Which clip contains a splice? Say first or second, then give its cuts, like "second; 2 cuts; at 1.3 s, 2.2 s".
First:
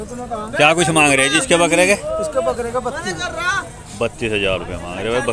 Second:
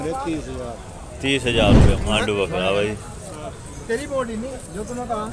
second; 1 cut; at 2.0 s